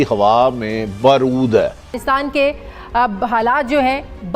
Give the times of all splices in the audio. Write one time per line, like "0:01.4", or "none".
0:01.9